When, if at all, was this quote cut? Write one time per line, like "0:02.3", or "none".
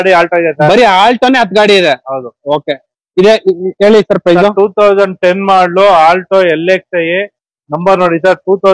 none